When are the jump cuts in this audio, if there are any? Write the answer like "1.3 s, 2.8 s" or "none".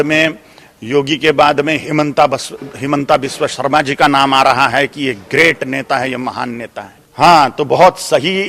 none